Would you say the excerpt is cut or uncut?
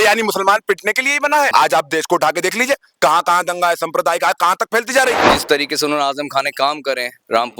cut